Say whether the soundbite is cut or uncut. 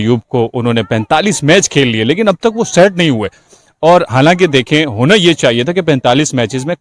uncut